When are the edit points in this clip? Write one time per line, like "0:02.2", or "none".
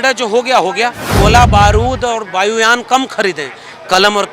0:01.0